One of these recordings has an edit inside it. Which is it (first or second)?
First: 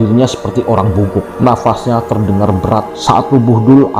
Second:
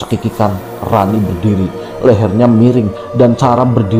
first